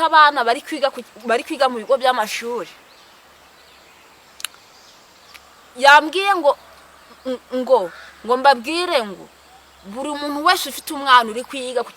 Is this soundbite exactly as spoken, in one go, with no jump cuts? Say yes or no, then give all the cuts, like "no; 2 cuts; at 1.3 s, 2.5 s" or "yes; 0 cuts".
yes; 0 cuts